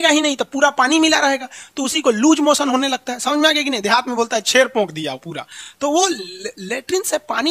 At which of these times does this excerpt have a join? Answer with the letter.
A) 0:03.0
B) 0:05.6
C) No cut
C